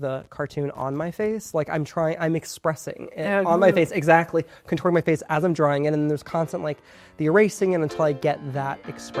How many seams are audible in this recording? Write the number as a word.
zero